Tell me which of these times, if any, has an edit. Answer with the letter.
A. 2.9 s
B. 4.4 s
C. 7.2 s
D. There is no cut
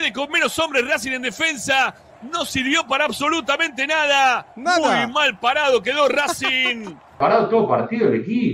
C